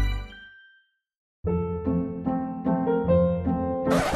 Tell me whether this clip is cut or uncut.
uncut